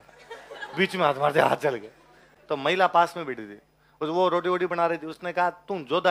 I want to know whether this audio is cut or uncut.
uncut